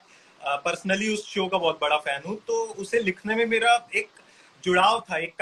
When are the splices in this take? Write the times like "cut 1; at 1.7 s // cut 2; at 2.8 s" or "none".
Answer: none